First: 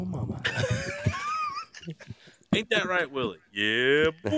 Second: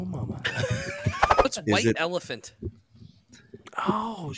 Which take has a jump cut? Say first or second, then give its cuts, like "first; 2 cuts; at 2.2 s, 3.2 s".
second; 1 cut; at 1.5 s